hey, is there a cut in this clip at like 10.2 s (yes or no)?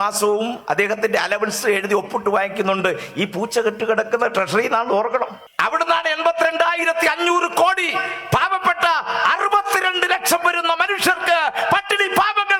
no